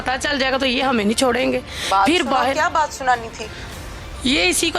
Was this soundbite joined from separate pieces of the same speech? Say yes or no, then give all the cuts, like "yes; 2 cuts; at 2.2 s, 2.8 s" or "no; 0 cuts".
no; 0 cuts